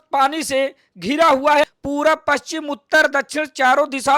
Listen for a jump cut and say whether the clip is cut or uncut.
cut